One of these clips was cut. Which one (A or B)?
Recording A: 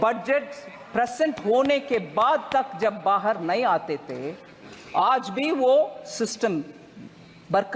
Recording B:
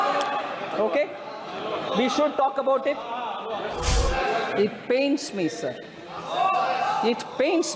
B